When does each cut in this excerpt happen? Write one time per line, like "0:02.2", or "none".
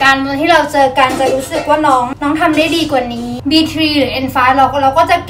0:02.1
0:03.3